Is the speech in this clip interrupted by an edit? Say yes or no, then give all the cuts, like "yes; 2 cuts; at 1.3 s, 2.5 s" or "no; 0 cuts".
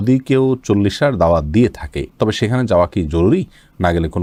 no; 0 cuts